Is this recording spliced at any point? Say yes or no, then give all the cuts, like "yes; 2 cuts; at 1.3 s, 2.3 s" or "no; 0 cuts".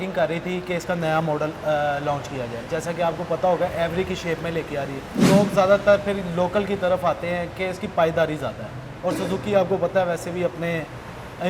yes; 1 cut; at 5.2 s